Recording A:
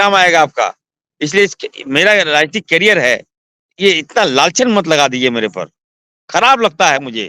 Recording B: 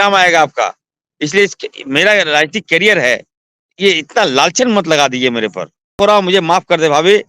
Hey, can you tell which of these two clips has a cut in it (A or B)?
B